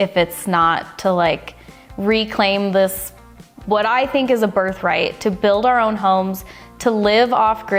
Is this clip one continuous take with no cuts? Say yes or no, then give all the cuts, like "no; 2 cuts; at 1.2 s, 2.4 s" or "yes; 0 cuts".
yes; 0 cuts